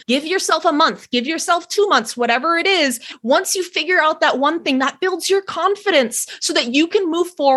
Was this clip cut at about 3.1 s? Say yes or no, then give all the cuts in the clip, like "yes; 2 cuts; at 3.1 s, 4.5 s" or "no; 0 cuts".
yes; 1 cut; at 3.1 s